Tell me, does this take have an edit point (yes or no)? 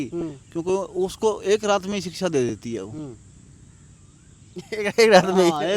no